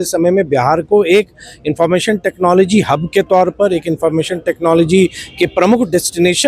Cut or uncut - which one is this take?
uncut